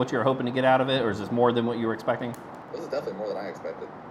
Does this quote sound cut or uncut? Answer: cut